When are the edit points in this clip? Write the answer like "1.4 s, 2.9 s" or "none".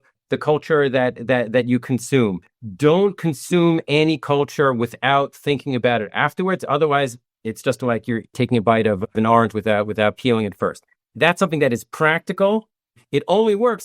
8.3 s, 9.1 s